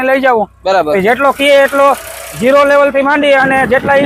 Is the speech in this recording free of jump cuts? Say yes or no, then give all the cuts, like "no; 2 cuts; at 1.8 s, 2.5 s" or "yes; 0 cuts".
yes; 0 cuts